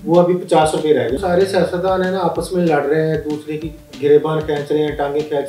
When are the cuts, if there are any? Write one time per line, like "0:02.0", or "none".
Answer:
0:01.2